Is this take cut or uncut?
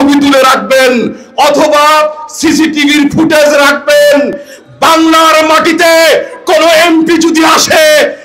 uncut